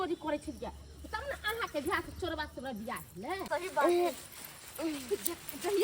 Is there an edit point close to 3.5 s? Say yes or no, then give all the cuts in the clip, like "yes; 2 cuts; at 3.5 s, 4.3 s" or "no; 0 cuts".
yes; 1 cut; at 3.5 s